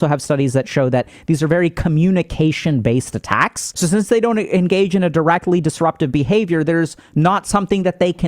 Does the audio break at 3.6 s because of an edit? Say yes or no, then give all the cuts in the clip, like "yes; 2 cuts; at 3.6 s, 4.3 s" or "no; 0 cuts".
yes; 1 cut; at 3.6 s